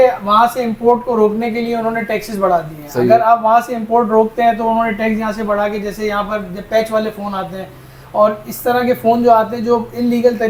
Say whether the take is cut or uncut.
uncut